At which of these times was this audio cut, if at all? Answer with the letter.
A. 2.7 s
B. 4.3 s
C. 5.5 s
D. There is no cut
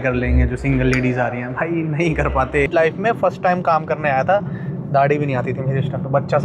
A